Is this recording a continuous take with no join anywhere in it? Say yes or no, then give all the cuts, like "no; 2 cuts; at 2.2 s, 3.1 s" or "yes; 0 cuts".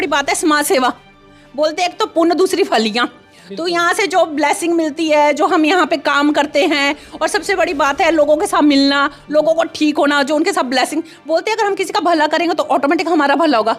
yes; 0 cuts